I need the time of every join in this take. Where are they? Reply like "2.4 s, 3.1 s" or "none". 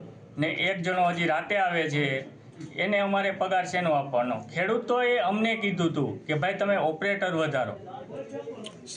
none